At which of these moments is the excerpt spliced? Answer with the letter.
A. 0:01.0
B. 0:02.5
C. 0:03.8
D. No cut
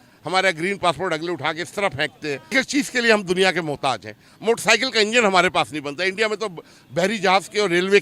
B